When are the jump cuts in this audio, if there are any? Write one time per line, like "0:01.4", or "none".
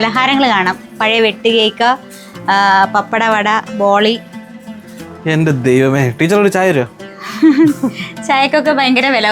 none